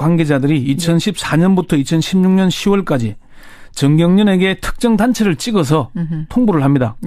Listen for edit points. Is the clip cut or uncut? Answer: cut